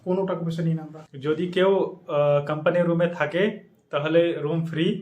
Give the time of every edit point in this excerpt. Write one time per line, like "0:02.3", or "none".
0:01.0